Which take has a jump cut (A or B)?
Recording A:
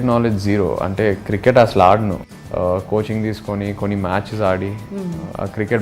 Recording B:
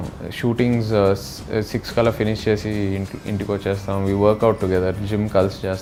A